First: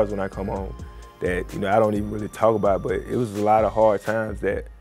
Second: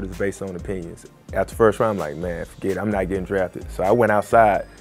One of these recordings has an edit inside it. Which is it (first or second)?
second